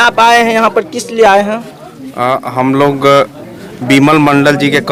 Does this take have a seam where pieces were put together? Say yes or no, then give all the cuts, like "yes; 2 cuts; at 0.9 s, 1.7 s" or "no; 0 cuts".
no; 0 cuts